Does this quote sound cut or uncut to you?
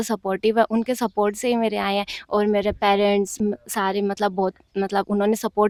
uncut